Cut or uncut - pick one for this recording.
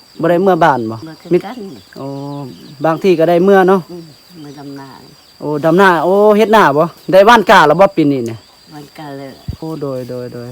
cut